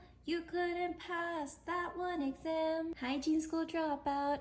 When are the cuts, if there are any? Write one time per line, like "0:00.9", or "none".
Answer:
0:03.0